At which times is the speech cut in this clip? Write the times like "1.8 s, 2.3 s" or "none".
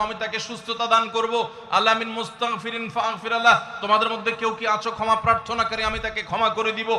none